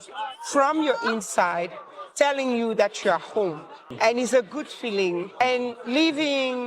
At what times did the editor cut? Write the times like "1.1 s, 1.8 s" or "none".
3.9 s, 5.4 s